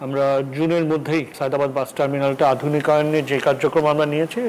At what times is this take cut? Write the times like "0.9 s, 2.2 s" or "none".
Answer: 1.3 s

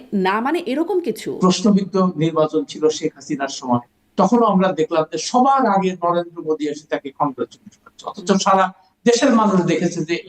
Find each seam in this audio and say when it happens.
1.3 s

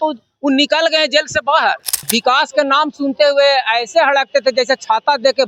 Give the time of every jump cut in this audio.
1.9 s

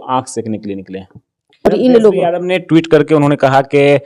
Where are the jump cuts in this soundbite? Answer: 1.7 s

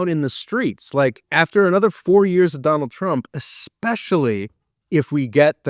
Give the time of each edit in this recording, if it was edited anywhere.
1.1 s

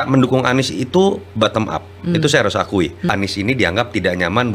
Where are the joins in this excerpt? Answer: 3.1 s

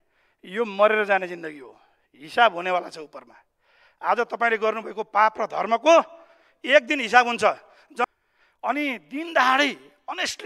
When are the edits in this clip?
8.1 s

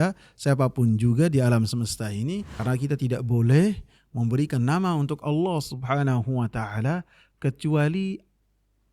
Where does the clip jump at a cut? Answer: 2.5 s

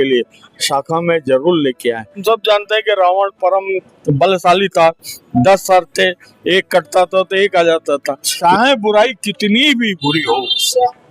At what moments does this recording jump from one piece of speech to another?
2.2 s, 8.3 s

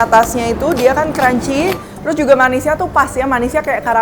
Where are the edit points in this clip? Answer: none

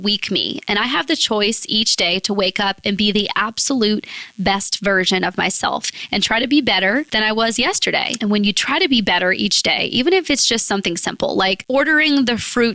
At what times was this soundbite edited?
7.1 s, 8.1 s

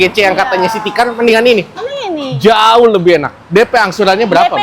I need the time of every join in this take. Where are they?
none

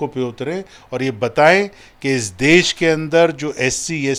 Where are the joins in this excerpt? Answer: none

